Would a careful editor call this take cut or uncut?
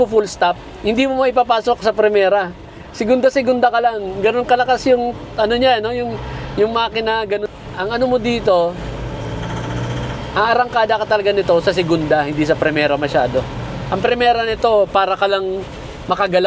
cut